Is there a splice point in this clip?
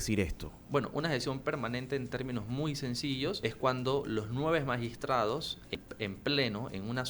yes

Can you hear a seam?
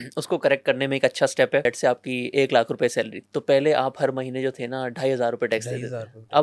yes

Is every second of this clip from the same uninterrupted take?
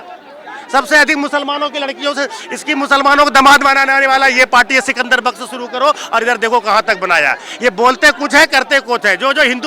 yes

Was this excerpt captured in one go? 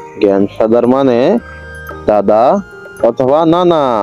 yes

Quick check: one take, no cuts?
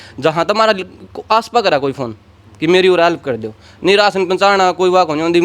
yes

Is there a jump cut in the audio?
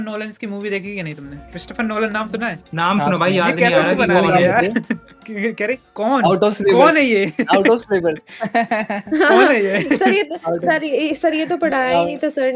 no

